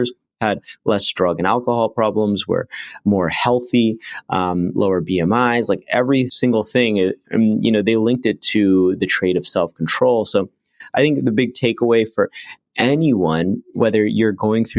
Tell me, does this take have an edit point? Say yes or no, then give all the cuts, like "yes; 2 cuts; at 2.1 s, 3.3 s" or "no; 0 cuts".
yes; 2 cuts; at 6.3 s, 13.7 s